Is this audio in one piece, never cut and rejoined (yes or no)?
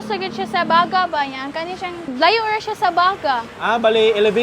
no